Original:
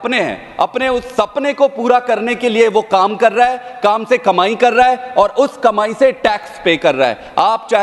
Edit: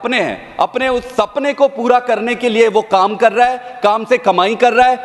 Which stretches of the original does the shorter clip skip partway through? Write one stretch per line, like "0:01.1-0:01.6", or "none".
none